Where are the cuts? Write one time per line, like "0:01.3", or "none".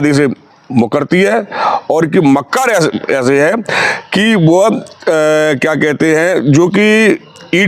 none